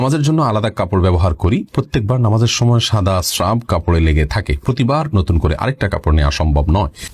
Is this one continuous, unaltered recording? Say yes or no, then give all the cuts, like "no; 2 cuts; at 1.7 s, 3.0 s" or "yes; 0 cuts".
yes; 0 cuts